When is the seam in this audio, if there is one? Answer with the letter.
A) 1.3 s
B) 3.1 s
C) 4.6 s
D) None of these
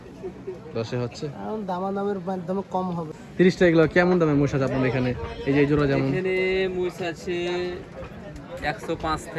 B